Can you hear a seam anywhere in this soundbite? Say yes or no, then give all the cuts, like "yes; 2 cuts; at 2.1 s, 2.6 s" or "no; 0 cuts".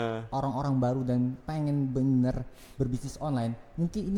no; 0 cuts